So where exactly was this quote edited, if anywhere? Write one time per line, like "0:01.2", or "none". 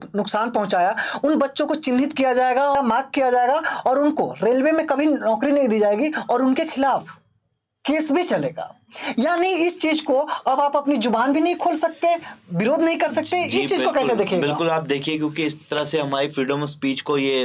0:02.7